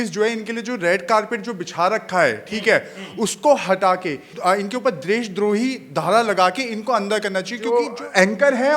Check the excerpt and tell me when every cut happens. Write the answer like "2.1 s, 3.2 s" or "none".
4.3 s, 7.6 s

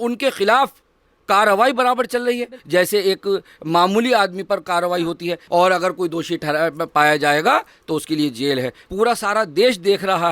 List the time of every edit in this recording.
2.5 s, 5.4 s, 8.8 s

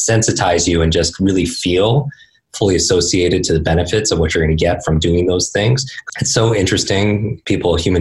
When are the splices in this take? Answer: 5.9 s

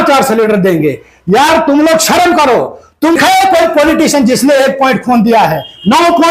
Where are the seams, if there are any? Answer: 3.2 s

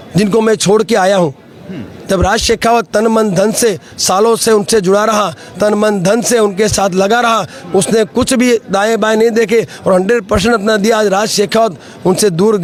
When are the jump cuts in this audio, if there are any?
none

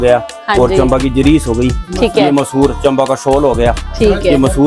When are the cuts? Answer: none

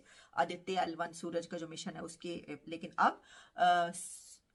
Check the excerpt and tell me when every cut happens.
none

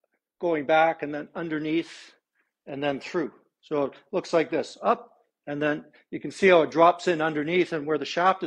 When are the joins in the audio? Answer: none

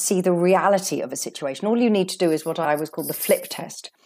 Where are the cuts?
none

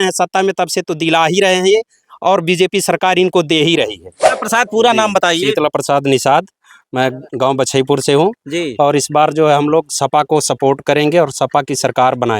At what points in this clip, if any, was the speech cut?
4.4 s

